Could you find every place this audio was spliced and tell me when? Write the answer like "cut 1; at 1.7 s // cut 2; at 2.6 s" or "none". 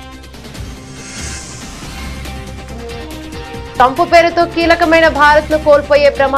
cut 1; at 1.6 s // cut 2; at 2.5 s

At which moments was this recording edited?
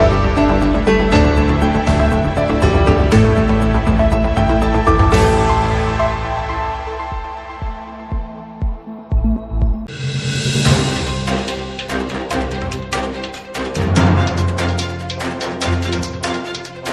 cut 1; at 9.9 s

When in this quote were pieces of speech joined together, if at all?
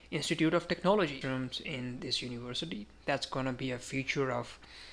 cut 1; at 1.2 s

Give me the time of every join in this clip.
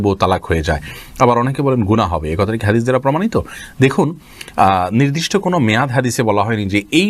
none

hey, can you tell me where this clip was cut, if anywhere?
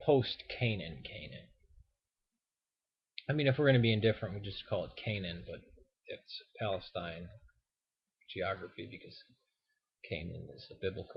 cut 1; at 2.1 s

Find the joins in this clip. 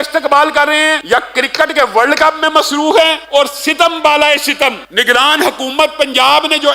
cut 1; at 1.0 s // cut 2; at 3.2 s // cut 3; at 4.8 s

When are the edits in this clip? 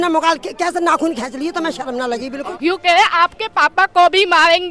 cut 1; at 2.5 s

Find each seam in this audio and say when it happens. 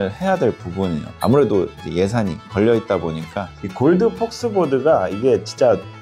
cut 1; at 3.6 s

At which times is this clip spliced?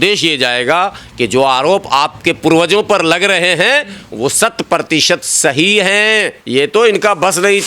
cut 1; at 6.4 s

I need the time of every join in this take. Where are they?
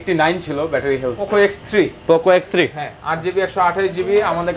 cut 1; at 1.2 s

